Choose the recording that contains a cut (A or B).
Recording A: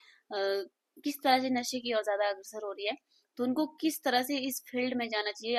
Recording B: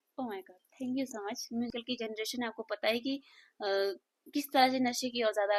B